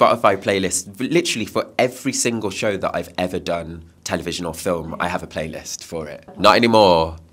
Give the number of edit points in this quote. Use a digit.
2